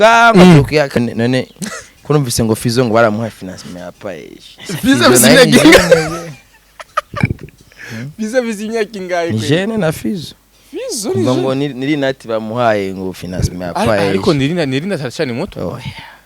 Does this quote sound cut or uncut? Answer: cut